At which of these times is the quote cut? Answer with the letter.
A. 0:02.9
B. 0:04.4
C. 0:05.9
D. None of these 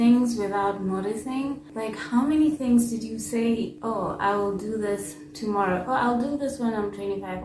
D